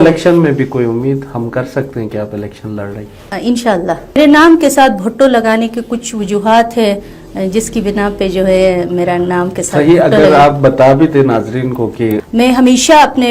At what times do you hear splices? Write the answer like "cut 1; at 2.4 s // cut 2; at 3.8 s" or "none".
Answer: cut 1; at 4.2 s // cut 2; at 12.2 s